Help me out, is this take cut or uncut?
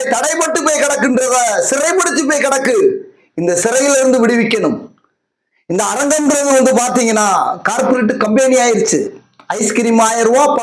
cut